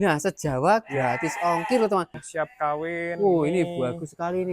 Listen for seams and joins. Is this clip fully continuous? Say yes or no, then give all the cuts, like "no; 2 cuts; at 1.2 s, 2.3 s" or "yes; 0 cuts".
no; 1 cut; at 2.2 s